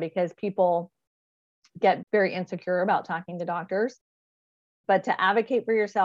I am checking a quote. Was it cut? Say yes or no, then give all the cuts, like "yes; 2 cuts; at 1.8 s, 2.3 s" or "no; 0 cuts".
yes; 1 cut; at 2.0 s